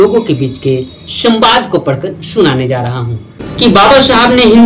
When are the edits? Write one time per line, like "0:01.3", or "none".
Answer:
0:03.5